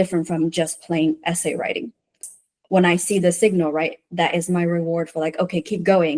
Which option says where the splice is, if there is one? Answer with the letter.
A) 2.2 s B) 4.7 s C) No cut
A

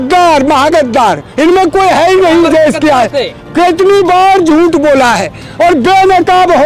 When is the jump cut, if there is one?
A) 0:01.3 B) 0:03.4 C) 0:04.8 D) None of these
B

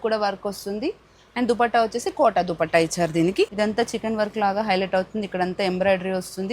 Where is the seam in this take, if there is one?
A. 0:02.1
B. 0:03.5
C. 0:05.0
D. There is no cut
B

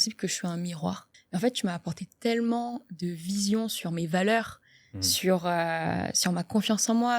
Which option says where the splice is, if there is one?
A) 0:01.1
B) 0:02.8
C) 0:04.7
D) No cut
A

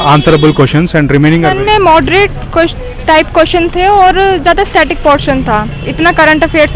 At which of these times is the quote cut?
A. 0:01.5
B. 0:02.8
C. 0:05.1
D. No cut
A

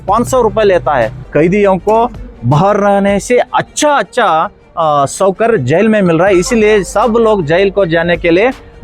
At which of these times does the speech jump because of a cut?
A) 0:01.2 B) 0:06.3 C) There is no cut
A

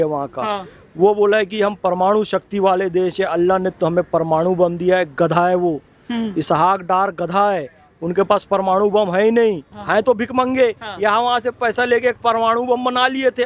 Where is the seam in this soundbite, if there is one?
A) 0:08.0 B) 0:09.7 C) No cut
B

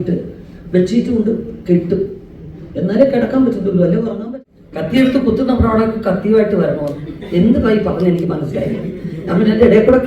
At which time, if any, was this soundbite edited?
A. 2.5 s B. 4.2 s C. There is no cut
B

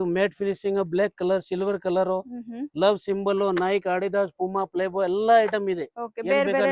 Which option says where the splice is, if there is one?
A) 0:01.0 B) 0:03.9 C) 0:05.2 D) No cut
D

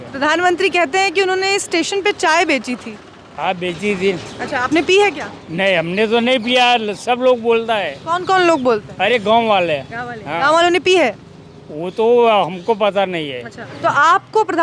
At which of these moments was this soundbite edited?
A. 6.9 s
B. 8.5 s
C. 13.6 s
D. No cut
C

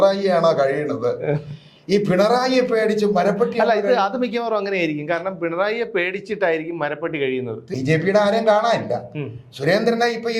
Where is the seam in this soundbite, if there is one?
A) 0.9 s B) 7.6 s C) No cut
B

